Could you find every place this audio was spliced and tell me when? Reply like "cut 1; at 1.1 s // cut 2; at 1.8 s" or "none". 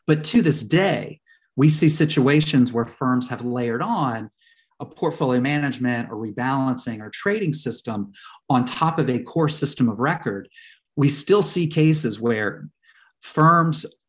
none